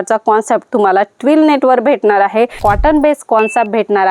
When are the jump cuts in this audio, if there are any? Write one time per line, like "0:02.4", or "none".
0:02.6